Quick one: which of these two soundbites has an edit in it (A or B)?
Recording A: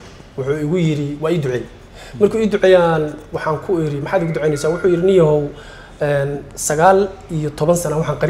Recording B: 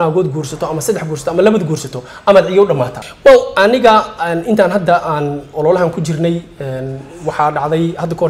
B